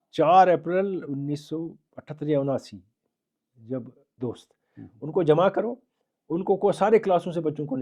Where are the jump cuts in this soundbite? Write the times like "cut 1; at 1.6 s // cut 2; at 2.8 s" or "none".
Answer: cut 1; at 4.0 s